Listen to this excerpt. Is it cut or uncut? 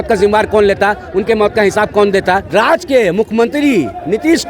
cut